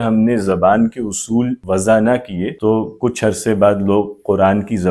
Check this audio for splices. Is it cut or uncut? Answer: uncut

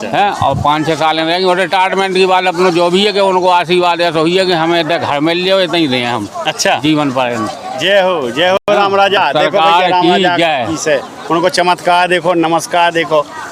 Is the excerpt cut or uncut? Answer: uncut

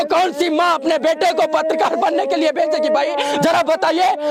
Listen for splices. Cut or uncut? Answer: uncut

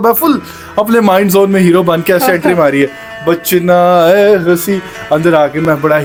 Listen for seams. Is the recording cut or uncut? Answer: uncut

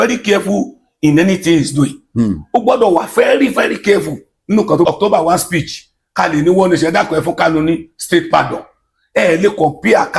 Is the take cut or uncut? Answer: cut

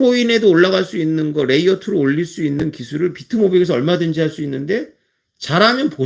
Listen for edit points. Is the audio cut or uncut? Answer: uncut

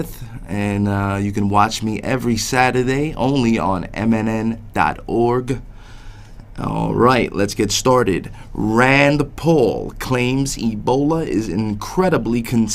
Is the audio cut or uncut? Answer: cut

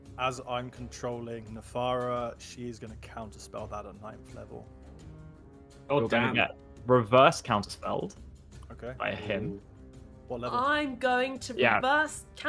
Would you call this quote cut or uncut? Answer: uncut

